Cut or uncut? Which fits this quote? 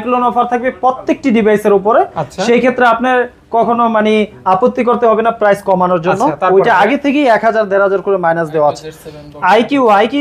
uncut